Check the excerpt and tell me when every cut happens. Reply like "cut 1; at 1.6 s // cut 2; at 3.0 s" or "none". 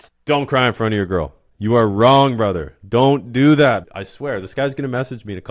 cut 1; at 4.0 s